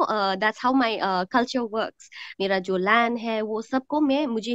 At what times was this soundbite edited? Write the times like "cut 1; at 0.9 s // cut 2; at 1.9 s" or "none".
cut 1; at 2.2 s